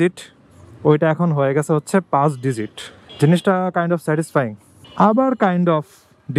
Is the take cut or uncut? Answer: uncut